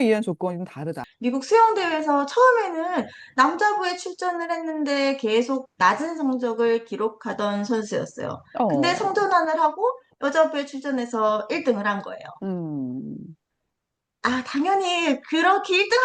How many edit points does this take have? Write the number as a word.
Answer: one